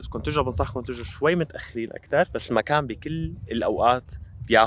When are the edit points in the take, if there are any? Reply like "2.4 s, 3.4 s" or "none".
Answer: 2.4 s